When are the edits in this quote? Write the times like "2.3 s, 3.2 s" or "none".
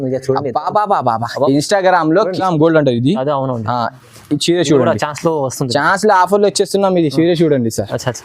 2.4 s